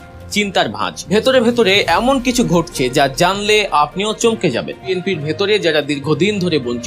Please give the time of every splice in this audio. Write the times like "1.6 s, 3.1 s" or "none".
0.9 s, 4.9 s